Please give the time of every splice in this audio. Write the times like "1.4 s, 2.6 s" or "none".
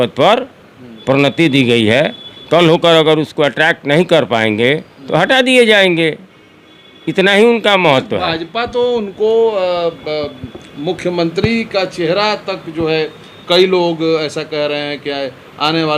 none